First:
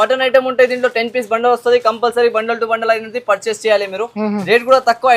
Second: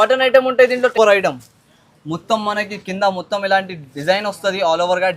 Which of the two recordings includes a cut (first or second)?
second